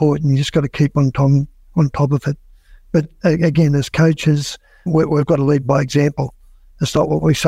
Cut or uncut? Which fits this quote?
cut